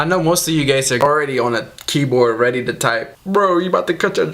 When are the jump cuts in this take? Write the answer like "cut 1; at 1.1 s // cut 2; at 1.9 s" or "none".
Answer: cut 1; at 1.0 s